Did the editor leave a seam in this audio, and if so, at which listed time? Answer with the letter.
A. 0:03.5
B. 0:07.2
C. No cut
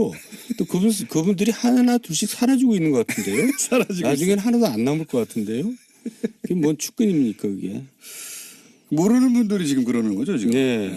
B